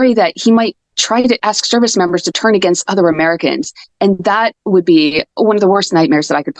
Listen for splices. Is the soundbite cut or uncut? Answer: uncut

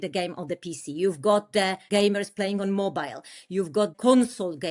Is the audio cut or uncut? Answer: cut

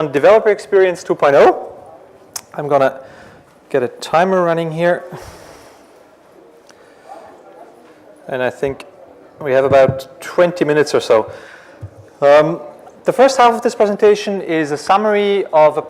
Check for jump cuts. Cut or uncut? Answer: uncut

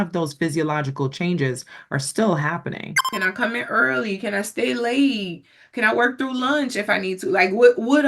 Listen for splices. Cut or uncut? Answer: cut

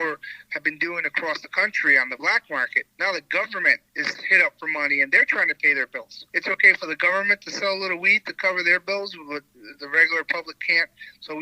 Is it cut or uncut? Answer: cut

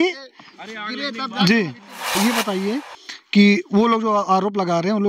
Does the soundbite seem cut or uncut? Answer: cut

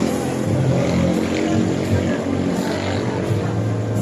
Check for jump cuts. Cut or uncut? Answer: uncut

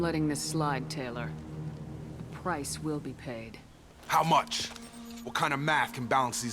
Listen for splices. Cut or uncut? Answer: uncut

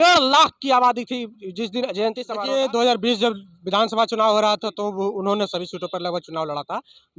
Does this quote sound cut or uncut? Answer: cut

